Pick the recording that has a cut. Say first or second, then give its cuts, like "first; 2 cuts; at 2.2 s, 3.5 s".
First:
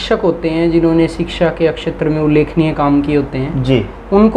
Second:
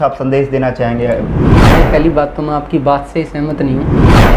second; 1 cut; at 1.6 s